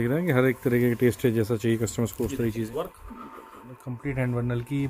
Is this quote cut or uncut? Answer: cut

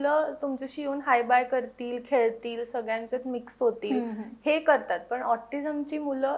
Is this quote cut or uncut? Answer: uncut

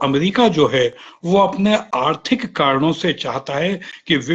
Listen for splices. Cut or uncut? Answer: uncut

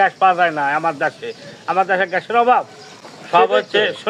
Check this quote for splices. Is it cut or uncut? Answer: uncut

